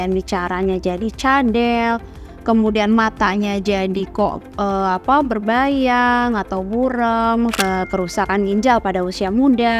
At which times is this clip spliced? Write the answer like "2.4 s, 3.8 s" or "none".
7.6 s